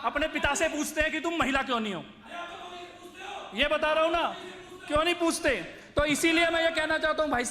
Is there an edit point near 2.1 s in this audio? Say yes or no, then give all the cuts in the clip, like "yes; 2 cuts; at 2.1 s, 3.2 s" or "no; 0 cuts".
no; 0 cuts